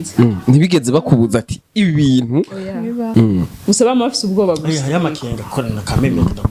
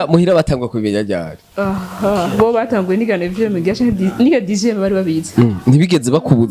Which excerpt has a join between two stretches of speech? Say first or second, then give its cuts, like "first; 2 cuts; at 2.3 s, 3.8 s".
first; 1 cut; at 3.1 s